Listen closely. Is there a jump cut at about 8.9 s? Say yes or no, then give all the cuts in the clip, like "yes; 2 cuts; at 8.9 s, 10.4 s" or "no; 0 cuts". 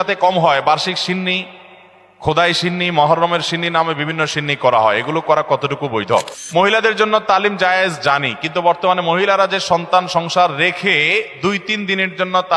no; 1 cut; at 6.4 s